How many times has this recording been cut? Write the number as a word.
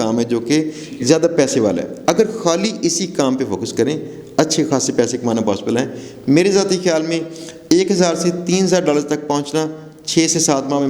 zero